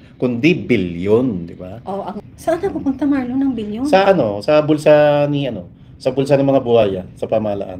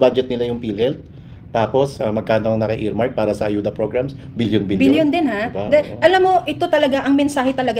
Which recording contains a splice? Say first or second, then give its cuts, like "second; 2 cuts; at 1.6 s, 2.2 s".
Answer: first; 1 cut; at 2.2 s